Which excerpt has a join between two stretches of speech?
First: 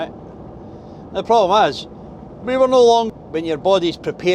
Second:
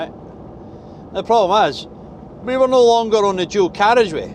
first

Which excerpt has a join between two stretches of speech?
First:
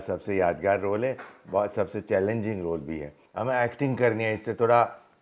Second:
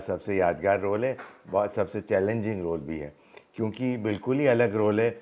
first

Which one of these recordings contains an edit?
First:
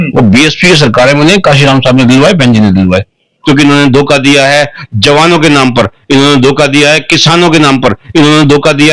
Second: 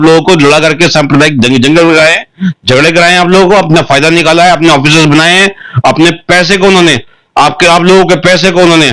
first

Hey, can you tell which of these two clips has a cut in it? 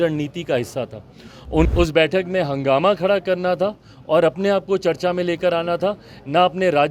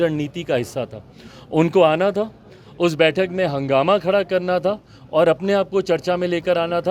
first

